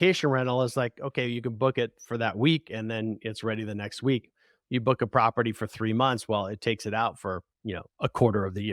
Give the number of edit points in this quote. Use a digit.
0